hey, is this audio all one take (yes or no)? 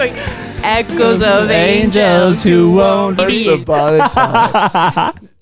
no